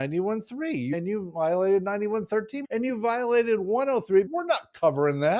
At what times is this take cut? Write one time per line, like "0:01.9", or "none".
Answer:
0:00.9
0:02.6
0:04.3